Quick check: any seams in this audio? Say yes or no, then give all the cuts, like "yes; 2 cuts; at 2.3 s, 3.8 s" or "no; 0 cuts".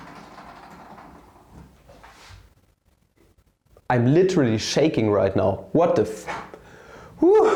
no; 0 cuts